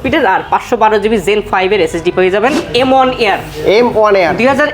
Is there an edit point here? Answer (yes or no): yes